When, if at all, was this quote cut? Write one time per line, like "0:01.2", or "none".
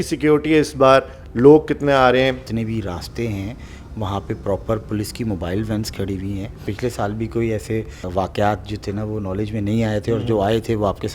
0:02.5
0:06.6
0:08.1